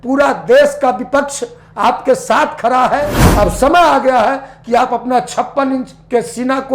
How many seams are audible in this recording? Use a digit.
1